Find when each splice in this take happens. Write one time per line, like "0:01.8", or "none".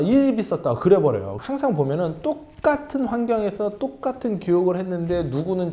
0:01.3